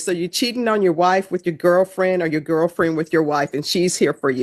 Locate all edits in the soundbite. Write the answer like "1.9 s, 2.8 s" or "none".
none